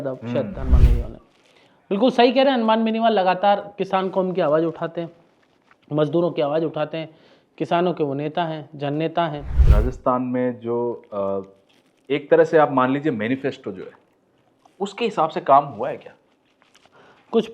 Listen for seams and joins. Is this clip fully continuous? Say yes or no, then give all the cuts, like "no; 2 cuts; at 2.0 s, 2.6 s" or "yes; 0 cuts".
no; 1 cut; at 9.5 s